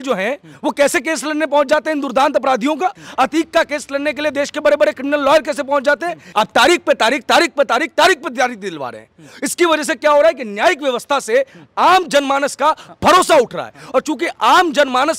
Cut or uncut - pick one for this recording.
cut